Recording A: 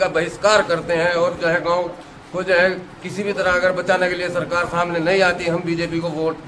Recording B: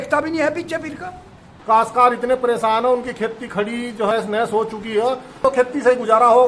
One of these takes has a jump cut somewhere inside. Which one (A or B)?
B